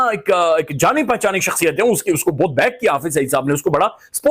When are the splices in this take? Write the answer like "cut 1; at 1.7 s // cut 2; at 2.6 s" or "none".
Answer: none